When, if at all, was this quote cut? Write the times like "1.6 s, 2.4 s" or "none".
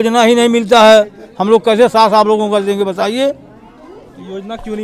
none